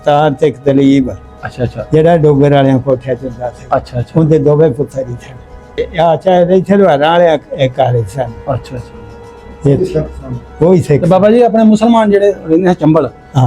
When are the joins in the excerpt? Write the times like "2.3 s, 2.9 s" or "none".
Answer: 5.7 s